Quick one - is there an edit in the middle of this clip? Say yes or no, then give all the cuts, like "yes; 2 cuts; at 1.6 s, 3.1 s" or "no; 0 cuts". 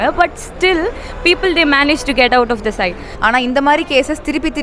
yes; 1 cut; at 3.1 s